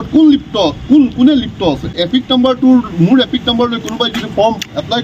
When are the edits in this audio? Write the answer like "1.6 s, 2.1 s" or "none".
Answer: 2.0 s